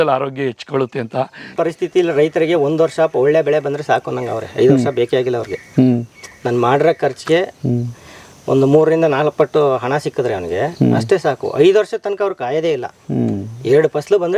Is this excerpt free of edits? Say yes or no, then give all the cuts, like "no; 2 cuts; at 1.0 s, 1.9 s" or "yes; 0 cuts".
no; 1 cut; at 1.5 s